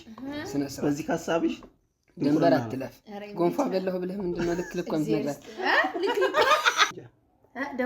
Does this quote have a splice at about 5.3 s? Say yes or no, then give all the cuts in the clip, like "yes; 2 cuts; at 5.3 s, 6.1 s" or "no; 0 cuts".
no; 1 cut; at 6.9 s